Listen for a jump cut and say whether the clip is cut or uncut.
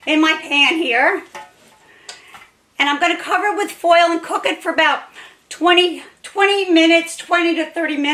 uncut